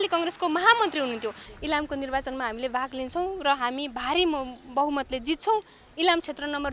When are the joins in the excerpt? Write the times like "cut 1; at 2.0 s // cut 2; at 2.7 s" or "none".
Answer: cut 1; at 1.4 s